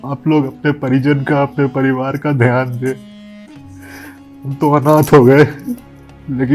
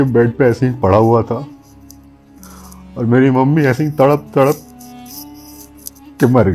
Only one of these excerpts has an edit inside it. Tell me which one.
second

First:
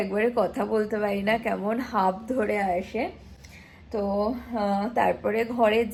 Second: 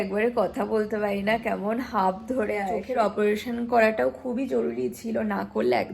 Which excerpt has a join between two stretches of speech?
second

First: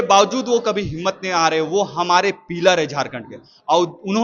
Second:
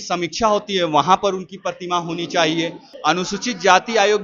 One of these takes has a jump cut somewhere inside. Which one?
second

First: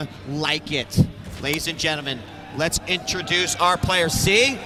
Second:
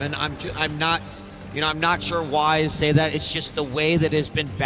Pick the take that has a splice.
second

